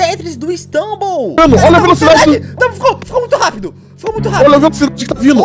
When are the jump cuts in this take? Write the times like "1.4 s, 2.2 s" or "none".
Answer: 1.3 s